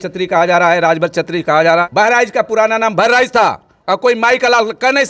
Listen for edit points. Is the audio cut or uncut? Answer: cut